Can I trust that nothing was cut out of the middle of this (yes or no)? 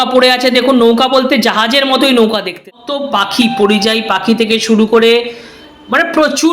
no